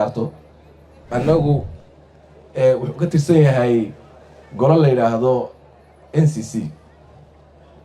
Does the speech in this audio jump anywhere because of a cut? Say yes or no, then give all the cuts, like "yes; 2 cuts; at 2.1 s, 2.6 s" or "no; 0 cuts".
yes; 1 cut; at 1.0 s